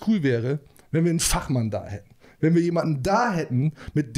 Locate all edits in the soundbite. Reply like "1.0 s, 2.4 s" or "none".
none